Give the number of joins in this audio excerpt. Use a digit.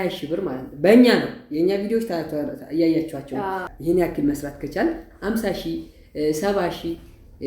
1